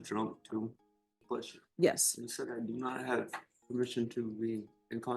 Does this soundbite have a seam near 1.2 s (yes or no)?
yes